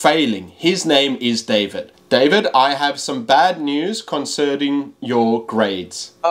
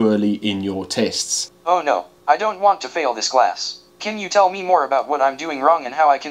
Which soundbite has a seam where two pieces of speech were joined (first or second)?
first